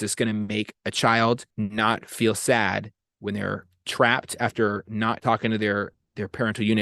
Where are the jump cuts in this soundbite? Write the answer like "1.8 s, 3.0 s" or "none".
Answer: 1.5 s, 5.2 s